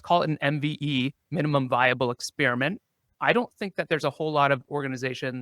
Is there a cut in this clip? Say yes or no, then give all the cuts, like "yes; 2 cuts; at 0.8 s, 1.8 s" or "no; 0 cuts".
yes; 1 cut; at 3.0 s